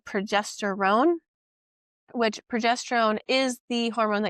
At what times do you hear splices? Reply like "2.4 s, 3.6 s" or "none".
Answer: none